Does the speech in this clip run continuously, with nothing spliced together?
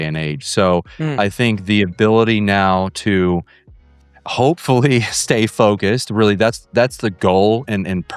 yes; 0 cuts

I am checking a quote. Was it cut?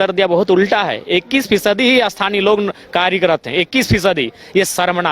no; 0 cuts

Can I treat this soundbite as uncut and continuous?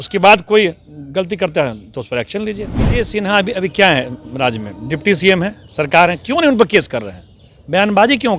no; 1 cut; at 3.1 s

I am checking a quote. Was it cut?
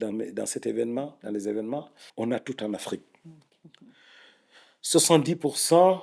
yes; 2 cuts; at 2.0 s, 3.5 s

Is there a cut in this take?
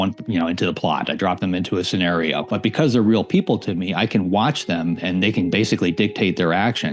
yes; 1 cut; at 2.4 s

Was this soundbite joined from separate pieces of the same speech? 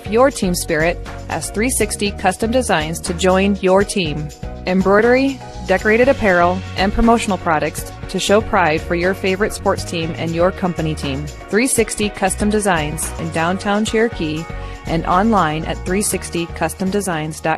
no; 0 cuts

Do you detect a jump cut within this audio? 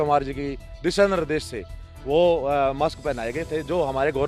no; 0 cuts

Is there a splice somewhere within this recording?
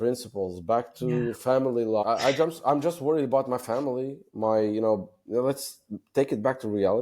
yes; 1 cut; at 2.0 s

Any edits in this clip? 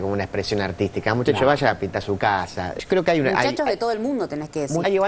no; 0 cuts

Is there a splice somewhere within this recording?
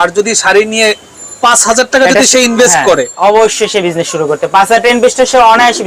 no; 0 cuts

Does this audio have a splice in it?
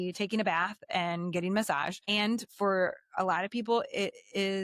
yes; 1 cut; at 2.0 s

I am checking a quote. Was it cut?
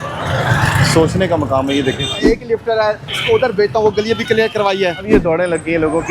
yes; 2 cuts; at 2.2 s, 5.1 s

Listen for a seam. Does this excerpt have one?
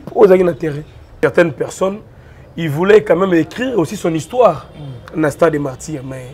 yes; 1 cut; at 1.2 s

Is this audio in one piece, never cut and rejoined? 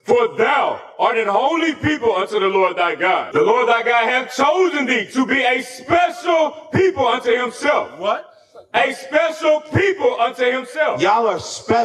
no; 1 cut; at 3.3 s

